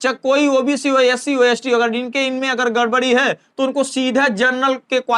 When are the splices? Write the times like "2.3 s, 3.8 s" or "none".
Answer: none